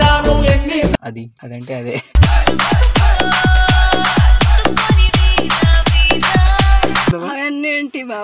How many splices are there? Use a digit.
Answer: 2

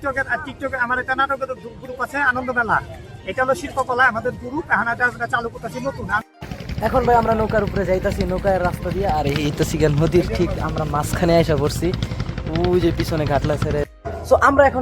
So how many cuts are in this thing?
2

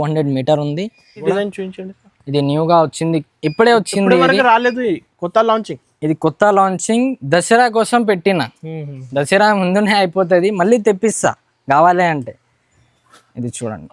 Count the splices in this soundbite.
1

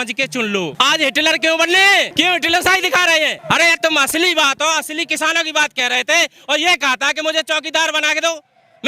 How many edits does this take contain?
3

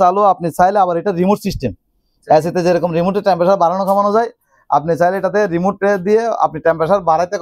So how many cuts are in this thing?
0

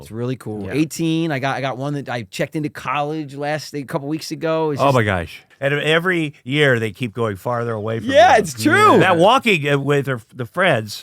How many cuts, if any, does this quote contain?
1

